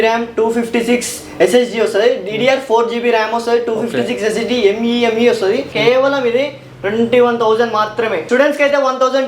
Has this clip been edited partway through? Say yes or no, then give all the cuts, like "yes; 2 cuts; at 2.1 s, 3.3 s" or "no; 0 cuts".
yes; 2 cuts; at 5.7 s, 8.2 s